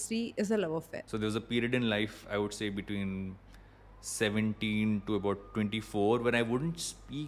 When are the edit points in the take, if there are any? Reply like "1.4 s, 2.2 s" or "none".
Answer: 1.0 s